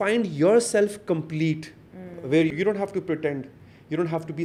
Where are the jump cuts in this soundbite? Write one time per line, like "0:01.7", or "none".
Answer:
none